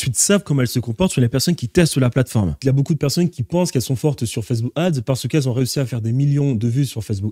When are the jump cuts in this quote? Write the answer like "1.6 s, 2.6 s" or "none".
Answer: 2.6 s